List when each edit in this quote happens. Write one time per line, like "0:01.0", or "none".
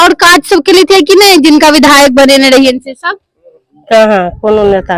none